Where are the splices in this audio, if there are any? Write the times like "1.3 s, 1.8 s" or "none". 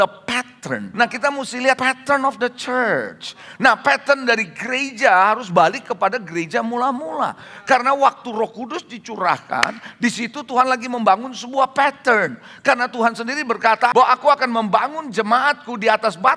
0.9 s, 1.8 s, 13.9 s